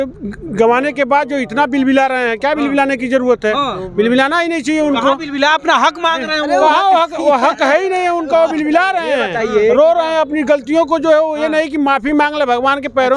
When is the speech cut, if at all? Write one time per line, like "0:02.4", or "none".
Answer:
none